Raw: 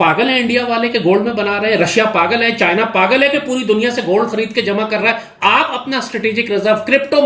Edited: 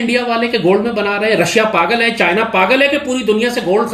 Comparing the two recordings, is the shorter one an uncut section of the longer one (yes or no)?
yes